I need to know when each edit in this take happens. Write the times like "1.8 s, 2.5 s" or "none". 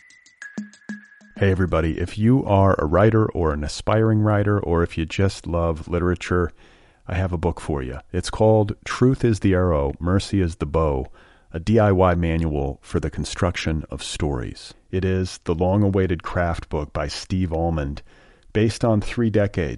0.9 s